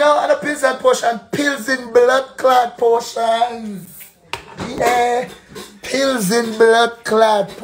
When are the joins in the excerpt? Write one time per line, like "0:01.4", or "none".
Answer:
none